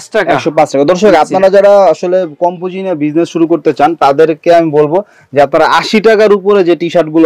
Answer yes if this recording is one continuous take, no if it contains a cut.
yes